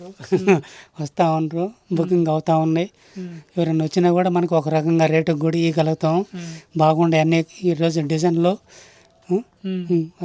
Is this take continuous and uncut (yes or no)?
yes